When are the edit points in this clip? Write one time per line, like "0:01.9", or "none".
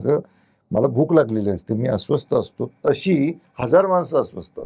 none